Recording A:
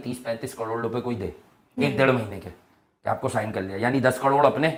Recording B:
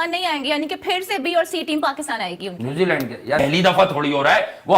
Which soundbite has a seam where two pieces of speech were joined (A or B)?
B